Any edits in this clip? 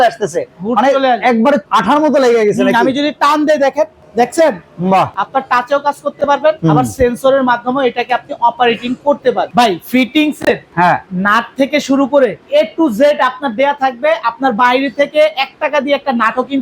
yes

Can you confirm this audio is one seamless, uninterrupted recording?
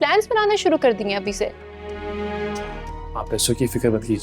no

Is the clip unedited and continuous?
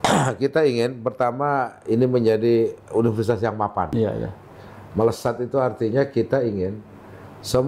no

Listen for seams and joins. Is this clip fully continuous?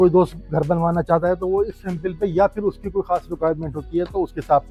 yes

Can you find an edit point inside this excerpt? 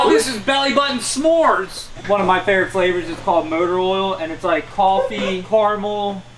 yes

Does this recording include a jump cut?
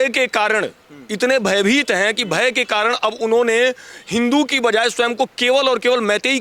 no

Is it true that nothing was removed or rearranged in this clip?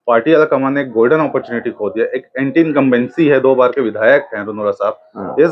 yes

